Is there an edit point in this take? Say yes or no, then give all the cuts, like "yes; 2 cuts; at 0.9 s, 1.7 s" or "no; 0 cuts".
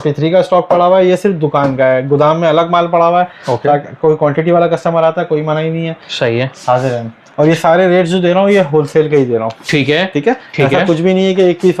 no; 0 cuts